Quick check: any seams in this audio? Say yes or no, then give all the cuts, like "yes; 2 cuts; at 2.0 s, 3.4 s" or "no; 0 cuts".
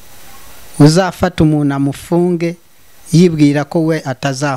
no; 0 cuts